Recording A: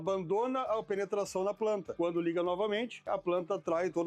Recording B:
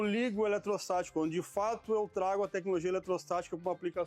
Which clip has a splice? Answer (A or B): A